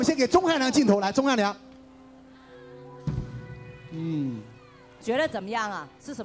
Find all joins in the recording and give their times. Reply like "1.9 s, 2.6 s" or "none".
none